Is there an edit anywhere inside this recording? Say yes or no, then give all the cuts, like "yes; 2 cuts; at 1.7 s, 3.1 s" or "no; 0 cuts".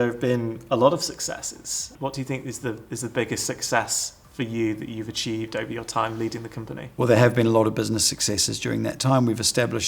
yes; 2 cuts; at 1.9 s, 6.8 s